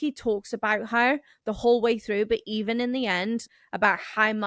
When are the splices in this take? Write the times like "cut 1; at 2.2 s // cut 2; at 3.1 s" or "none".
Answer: cut 1; at 3.4 s

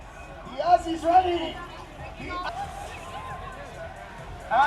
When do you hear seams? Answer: cut 1; at 2.5 s

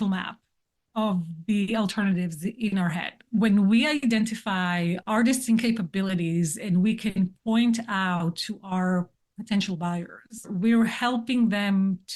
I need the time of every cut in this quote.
cut 1; at 3.1 s // cut 2; at 10.5 s

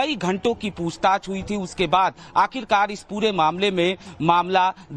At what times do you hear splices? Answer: cut 1; at 3.0 s

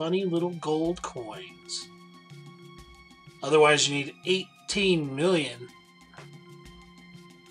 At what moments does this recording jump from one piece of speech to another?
cut 1; at 2.3 s

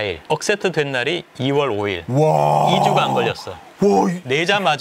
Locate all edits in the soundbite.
none

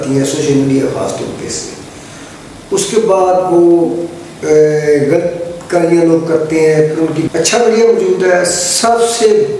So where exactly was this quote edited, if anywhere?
cut 1; at 7.2 s

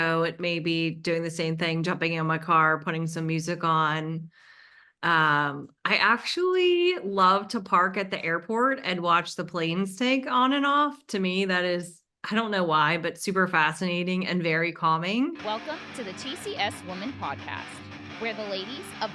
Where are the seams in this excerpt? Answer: cut 1; at 15.4 s

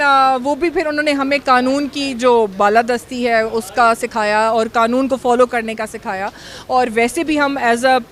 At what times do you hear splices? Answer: none

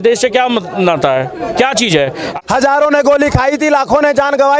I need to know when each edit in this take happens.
cut 1; at 2.2 s

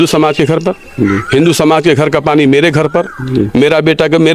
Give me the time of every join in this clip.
none

